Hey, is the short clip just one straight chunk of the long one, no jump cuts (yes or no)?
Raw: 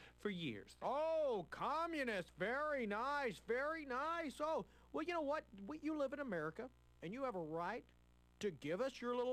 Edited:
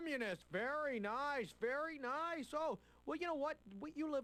yes